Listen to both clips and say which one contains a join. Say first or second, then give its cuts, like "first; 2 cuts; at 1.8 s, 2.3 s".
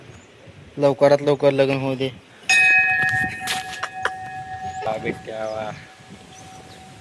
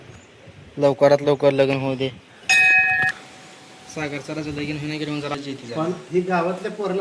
second; 2 cuts; at 3.1 s, 5.3 s